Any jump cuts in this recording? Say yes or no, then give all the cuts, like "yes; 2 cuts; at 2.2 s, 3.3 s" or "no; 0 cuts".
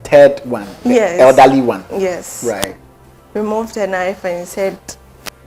no; 0 cuts